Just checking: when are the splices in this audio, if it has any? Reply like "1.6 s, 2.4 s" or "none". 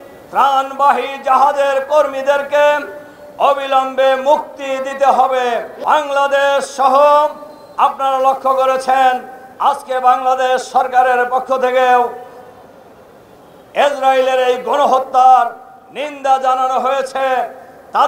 none